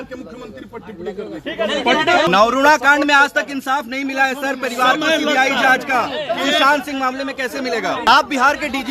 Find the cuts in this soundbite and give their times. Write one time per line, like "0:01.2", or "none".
0:02.3
0:08.1